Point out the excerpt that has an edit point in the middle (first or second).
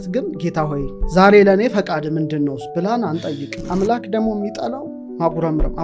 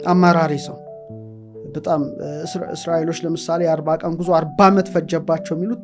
first